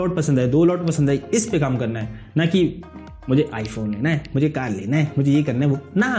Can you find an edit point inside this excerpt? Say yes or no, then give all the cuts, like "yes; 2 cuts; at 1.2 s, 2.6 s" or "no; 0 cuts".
no; 0 cuts